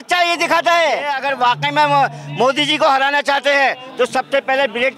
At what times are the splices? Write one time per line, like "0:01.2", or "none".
0:01.2